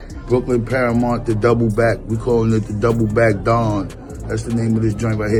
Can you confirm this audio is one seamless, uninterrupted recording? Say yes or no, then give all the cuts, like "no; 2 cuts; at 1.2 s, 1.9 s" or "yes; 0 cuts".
yes; 0 cuts